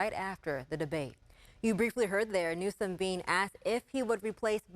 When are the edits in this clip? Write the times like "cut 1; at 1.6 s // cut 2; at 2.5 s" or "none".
cut 1; at 1.2 s